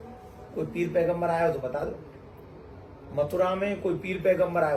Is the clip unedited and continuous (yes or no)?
yes